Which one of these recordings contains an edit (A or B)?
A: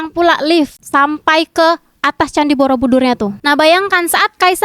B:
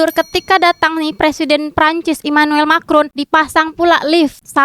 A